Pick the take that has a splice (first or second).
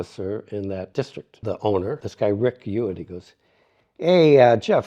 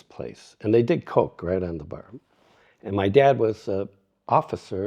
first